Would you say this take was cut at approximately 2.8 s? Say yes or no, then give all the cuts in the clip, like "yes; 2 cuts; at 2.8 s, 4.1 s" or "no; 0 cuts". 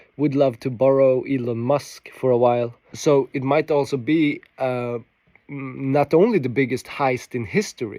yes; 1 cut; at 2.8 s